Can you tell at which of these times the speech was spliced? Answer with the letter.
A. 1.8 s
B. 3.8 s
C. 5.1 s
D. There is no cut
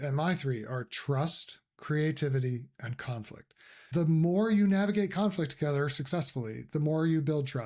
B